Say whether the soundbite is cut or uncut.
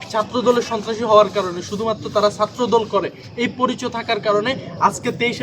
uncut